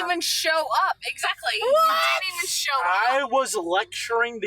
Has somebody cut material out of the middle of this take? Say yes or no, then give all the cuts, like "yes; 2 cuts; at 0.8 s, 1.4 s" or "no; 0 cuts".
yes; 1 cut; at 3.0 s